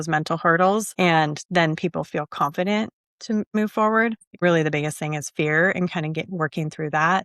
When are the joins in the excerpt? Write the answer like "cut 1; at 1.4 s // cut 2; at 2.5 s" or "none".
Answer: cut 1; at 3.5 s // cut 2; at 4.4 s